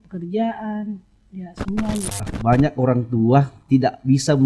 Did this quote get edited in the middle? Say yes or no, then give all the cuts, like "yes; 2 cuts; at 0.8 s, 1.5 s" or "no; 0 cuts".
yes; 1 cut; at 2.3 s